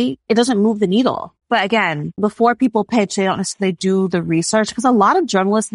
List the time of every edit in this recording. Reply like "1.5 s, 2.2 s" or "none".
1.3 s, 2.2 s